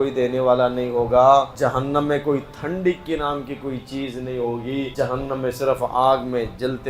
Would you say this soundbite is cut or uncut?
cut